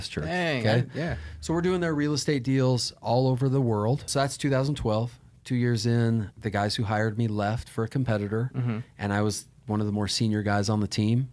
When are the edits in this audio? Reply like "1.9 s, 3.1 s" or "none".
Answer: 4.1 s, 6.3 s